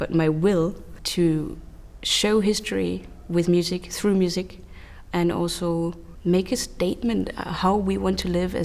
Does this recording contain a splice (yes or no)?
yes